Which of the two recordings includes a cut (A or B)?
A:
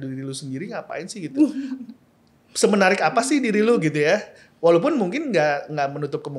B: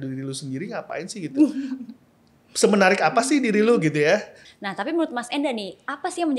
B